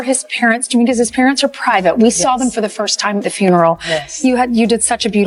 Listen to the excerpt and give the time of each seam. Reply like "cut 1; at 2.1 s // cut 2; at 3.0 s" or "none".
none